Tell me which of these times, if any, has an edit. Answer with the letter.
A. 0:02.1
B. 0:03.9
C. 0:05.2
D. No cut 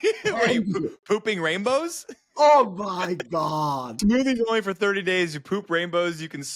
B